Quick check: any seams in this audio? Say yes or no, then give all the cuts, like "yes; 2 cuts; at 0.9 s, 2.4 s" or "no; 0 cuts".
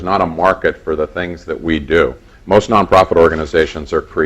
yes; 1 cut; at 3.2 s